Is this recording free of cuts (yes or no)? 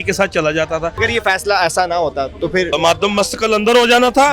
no